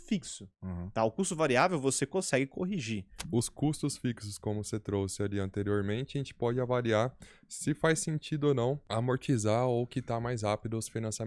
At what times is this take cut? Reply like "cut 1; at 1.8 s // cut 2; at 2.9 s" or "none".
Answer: cut 1; at 3.2 s // cut 2; at 8.8 s

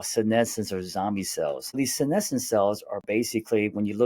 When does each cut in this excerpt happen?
cut 1; at 1.8 s

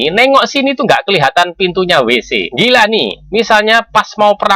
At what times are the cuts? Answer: cut 1; at 3.2 s

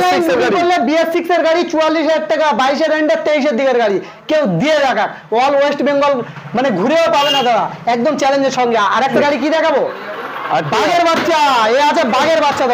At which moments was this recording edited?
cut 1; at 9.1 s

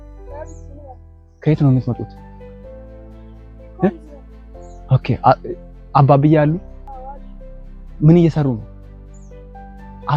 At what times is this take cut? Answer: none

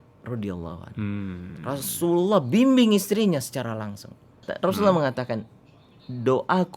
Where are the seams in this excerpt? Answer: cut 1; at 4.5 s

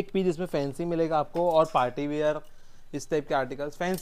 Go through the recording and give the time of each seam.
none

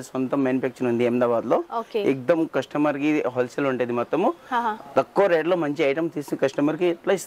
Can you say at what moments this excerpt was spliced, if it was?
none

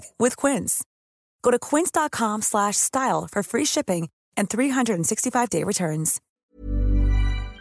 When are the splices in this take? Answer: cut 1; at 6.2 s

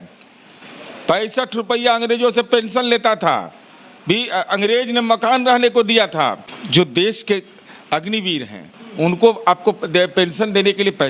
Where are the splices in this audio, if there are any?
cut 1; at 6.5 s

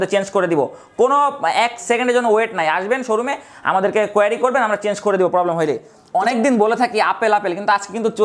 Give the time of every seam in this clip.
cut 1; at 5.9 s

